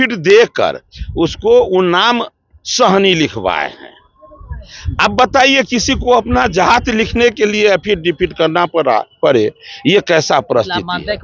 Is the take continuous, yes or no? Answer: yes